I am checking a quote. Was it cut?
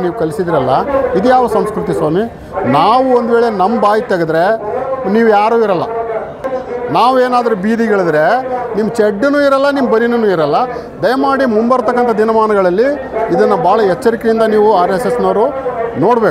no; 0 cuts

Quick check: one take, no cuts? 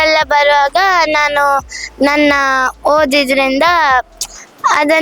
yes; 0 cuts

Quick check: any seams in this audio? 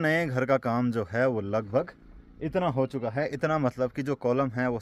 no; 0 cuts

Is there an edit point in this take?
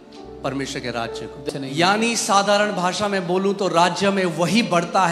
yes; 1 cut; at 1.4 s

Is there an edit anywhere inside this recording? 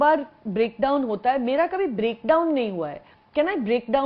no; 0 cuts

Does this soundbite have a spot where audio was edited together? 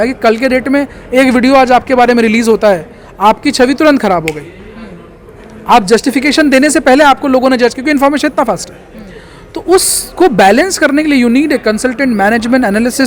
no; 0 cuts

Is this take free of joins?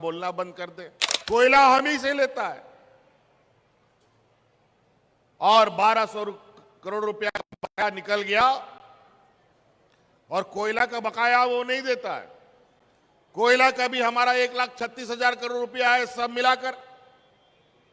no; 1 cut; at 1.1 s

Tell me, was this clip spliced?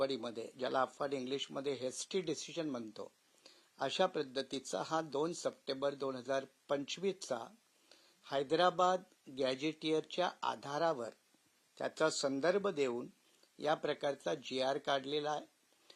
no; 0 cuts

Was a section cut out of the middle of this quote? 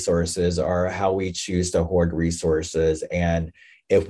no; 0 cuts

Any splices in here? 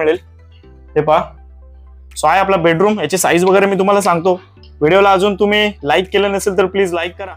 no; 0 cuts

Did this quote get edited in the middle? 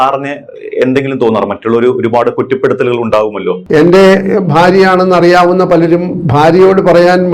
yes; 1 cut; at 3.6 s

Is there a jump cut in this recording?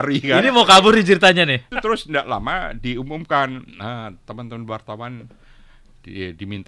yes; 1 cut; at 1.7 s

